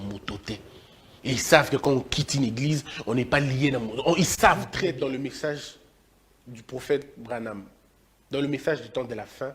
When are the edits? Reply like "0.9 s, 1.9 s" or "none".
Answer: 4.7 s